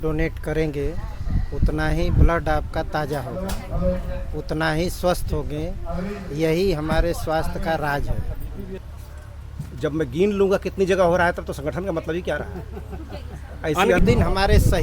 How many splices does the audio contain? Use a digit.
2